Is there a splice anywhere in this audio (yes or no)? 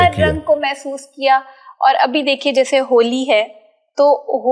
no